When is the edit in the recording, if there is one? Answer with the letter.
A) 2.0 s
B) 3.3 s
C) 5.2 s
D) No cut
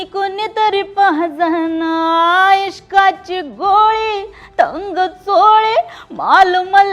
D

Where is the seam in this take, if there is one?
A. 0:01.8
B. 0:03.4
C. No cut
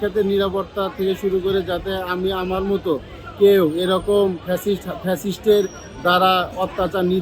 C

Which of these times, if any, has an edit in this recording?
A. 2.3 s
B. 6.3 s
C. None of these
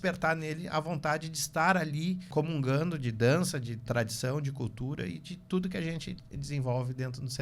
A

